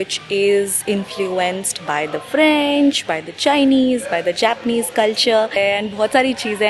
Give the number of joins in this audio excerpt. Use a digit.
1